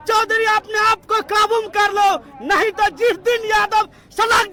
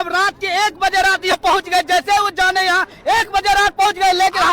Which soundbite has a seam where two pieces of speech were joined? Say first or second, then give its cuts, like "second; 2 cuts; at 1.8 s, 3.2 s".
second; 1 cut; at 1.3 s